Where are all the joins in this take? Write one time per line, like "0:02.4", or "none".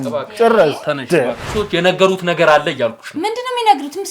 0:01.4